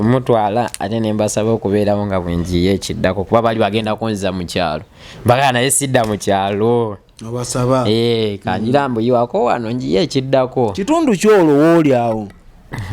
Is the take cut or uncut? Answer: uncut